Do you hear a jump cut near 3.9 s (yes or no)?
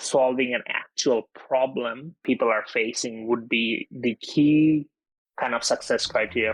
no